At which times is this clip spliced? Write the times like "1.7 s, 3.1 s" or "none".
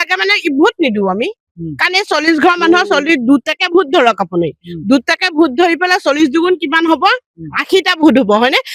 none